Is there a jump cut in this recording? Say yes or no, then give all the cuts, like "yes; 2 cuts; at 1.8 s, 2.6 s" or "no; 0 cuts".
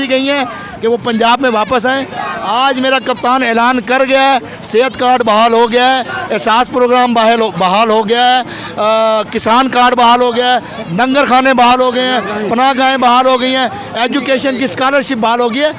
no; 0 cuts